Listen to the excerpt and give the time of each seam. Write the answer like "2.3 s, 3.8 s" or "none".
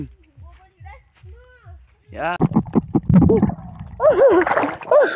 2.4 s